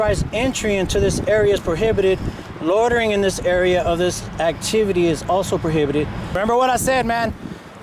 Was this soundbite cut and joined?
yes; 1 cut; at 6.4 s

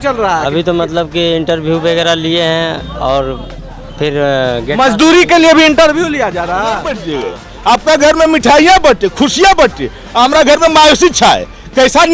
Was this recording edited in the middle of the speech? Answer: yes; 1 cut; at 7.1 s

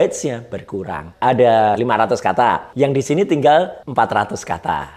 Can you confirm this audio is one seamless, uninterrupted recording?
no; 3 cuts; at 1.0 s, 2.2 s, 3.8 s

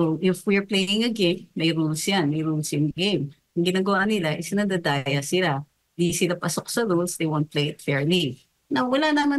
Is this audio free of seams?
yes; 0 cuts

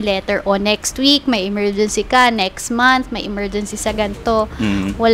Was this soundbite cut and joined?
no; 0 cuts

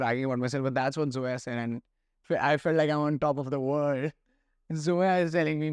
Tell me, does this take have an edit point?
no; 0 cuts

